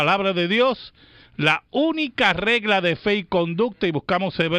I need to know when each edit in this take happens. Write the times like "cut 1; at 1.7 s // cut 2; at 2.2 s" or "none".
cut 1; at 1.2 s